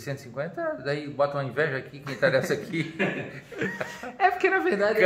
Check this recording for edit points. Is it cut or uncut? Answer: uncut